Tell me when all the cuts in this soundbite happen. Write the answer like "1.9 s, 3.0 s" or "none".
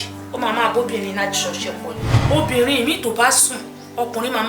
2.1 s